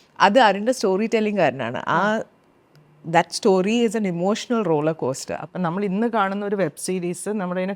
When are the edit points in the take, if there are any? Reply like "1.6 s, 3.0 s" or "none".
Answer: 5.3 s